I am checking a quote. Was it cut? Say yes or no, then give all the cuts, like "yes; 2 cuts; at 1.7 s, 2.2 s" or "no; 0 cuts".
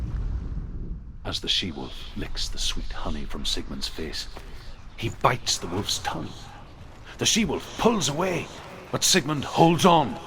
yes; 1 cut; at 1.2 s